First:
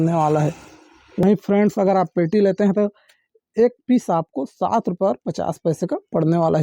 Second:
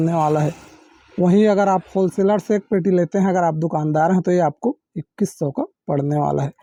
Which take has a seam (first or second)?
first